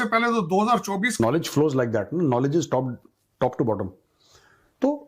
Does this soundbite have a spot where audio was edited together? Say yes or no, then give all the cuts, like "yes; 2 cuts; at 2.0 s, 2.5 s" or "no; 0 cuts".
yes; 1 cut; at 1.2 s